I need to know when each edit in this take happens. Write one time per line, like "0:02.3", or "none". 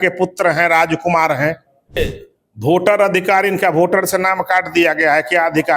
0:02.0